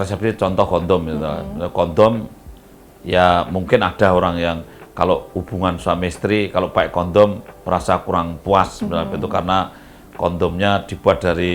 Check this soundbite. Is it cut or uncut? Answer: uncut